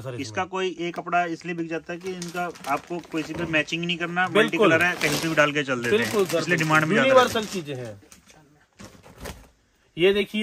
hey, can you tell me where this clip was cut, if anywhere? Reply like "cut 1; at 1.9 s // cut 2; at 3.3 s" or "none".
none